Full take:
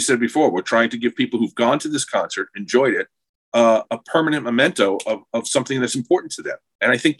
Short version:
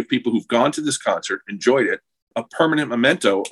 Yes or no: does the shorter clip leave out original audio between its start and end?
yes